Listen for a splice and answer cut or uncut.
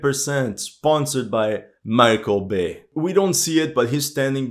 uncut